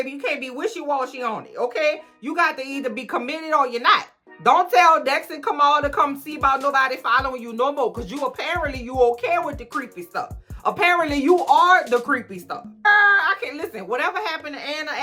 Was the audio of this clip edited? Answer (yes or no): no